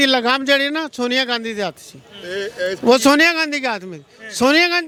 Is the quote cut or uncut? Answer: uncut